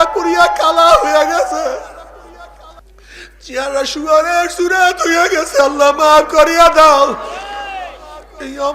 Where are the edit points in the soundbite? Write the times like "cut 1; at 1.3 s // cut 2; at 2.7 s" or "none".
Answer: cut 1; at 2.8 s